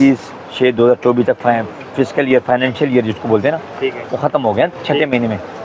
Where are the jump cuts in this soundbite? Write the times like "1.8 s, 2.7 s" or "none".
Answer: none